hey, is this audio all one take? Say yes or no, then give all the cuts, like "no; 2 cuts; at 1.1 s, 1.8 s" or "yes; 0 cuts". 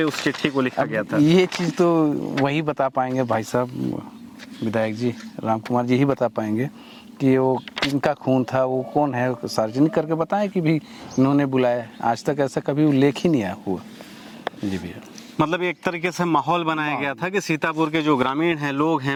yes; 0 cuts